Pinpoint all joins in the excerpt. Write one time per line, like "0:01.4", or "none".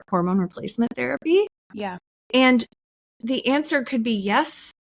none